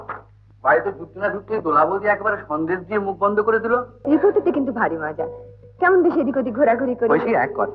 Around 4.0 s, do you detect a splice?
yes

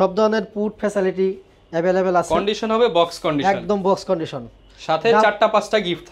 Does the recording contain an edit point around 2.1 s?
no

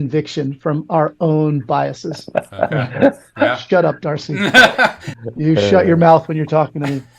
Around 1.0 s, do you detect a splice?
no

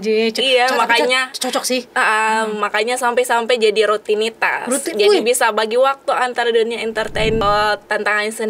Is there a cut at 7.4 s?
yes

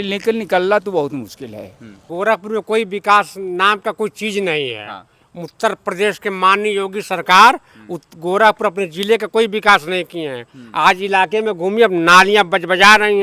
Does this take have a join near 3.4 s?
no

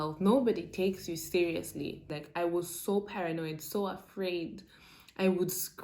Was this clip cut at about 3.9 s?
no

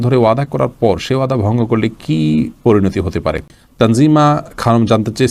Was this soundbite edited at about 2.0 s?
no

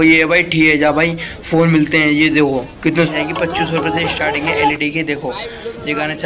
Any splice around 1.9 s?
no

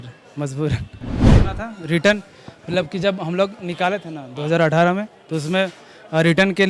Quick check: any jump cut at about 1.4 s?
yes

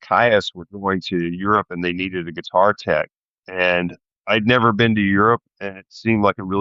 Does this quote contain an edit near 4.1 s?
yes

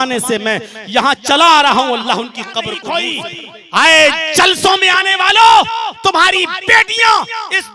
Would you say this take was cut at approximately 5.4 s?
no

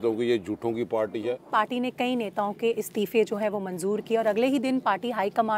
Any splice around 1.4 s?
yes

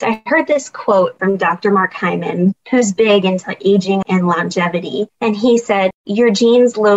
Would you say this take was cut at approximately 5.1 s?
yes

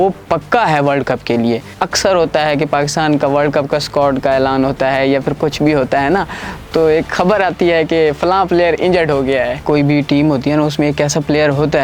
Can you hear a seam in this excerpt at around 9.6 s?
yes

